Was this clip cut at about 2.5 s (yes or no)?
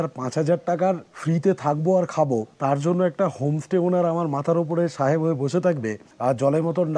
yes